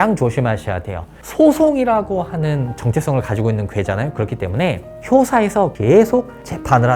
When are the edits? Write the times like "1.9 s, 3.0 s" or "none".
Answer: 1.2 s